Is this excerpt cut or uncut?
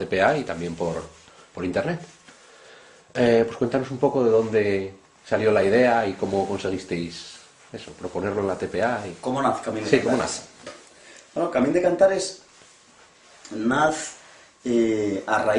cut